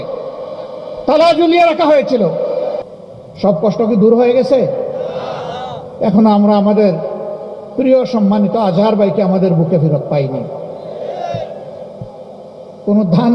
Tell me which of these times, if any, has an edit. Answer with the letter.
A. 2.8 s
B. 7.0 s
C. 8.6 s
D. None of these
A